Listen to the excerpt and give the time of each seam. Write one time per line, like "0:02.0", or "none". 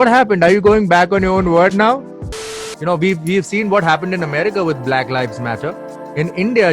0:02.3